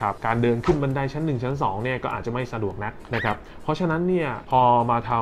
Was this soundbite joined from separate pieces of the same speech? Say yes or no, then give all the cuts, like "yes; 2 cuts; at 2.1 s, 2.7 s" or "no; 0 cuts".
yes; 1 cut; at 3.0 s